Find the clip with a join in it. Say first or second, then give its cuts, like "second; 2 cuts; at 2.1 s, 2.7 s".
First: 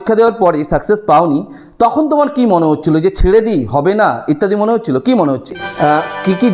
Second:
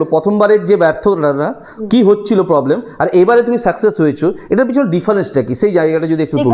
first; 1 cut; at 5.5 s